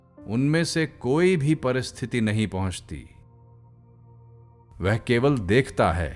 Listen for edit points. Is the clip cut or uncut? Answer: cut